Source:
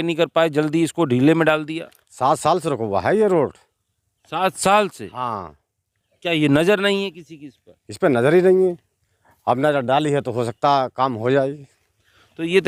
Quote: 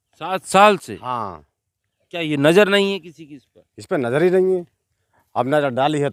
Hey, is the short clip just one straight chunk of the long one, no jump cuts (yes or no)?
yes